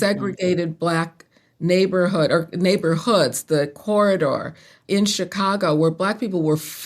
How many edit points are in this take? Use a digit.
1